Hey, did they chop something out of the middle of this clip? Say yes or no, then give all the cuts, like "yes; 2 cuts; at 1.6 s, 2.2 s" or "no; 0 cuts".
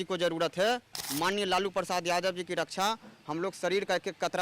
yes; 1 cut; at 1.0 s